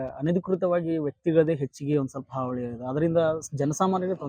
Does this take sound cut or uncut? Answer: uncut